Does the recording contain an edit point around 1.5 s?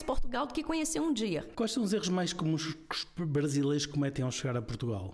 yes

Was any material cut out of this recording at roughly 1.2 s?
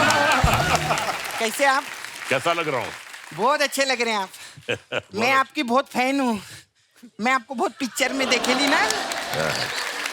yes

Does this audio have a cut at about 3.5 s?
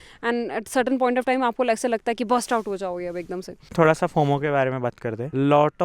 yes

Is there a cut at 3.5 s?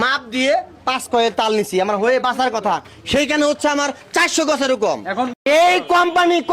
no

